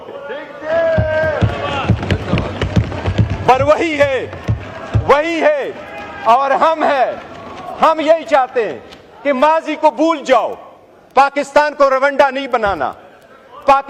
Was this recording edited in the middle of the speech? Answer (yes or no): no